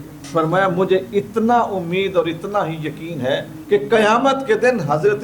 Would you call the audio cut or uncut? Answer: uncut